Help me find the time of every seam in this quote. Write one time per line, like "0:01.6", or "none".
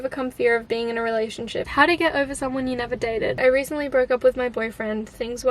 0:01.7
0:03.4